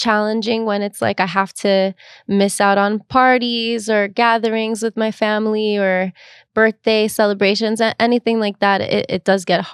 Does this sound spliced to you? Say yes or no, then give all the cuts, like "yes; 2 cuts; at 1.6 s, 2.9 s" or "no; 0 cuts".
no; 0 cuts